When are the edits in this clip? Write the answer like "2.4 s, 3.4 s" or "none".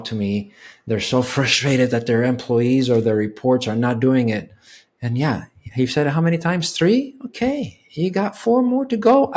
none